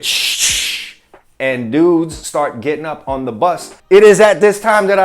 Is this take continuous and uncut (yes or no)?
no